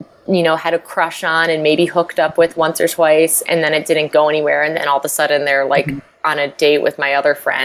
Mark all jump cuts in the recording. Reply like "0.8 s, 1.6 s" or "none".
none